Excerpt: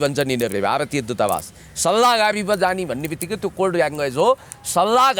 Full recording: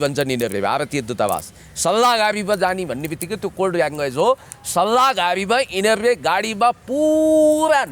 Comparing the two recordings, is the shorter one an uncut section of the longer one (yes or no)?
yes